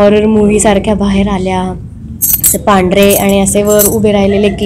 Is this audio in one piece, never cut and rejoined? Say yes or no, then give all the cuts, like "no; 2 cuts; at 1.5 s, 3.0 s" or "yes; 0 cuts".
yes; 0 cuts